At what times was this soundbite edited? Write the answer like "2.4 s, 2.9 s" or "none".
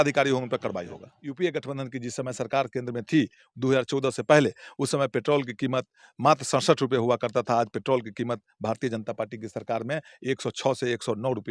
1.1 s